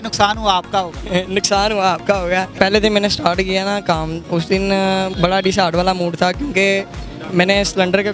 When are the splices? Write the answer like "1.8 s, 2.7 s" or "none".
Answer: 2.5 s